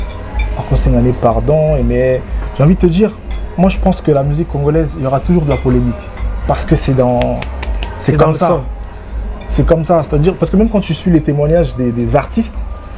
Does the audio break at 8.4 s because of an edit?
no; 0 cuts

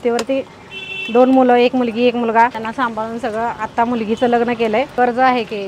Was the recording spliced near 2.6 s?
yes; 2 cuts; at 2.6 s, 4.9 s

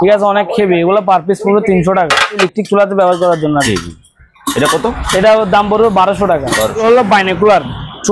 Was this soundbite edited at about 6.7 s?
yes; 2 cuts; at 2.4 s, 6.7 s

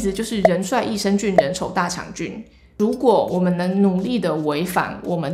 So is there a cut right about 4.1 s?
no; 1 cut; at 2.6 s

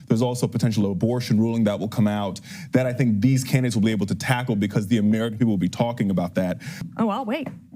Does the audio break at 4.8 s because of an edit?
no; 1 cut; at 6.8 s

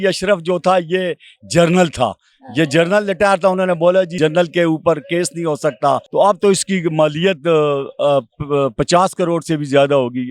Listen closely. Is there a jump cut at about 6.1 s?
yes; 2 cuts; at 4.1 s, 6.1 s

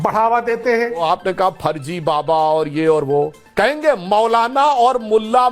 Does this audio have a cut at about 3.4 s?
yes; 2 cuts; at 1.0 s, 3.4 s

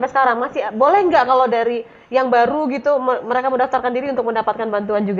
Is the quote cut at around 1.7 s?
no; 0 cuts

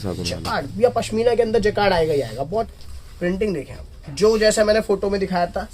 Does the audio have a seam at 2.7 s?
yes; 1 cut; at 2.7 s

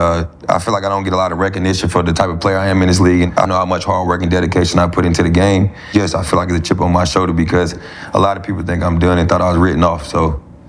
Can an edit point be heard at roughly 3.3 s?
yes; 2 cuts; at 3.3 s, 5.9 s

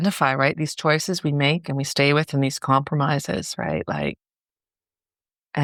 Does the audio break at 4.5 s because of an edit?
no; 0 cuts

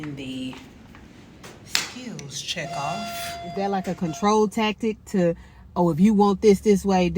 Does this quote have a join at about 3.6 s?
yes; 1 cut; at 3.6 s

